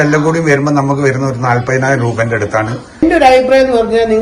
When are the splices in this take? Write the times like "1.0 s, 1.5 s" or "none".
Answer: 3.0 s